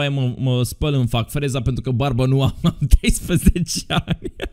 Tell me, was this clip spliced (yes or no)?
no